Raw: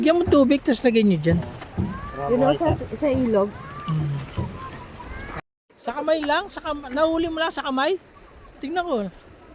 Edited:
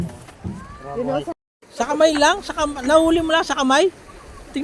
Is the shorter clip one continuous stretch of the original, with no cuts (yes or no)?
no